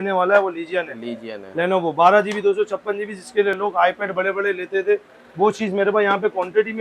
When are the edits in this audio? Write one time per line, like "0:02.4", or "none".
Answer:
none